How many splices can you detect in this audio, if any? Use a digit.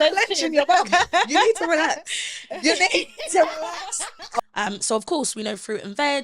1